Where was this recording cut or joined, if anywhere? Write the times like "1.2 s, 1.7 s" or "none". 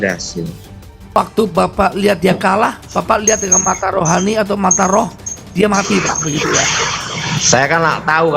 1.2 s